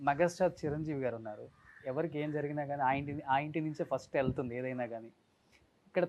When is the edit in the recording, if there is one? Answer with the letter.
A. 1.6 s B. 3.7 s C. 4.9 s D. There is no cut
D